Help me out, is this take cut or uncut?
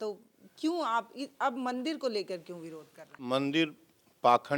cut